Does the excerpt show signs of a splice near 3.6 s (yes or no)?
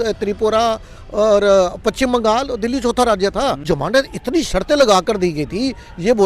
yes